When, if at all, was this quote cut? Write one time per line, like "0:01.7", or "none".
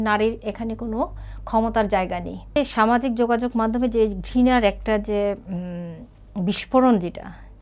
0:02.5